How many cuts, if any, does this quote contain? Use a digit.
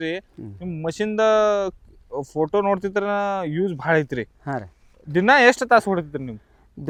0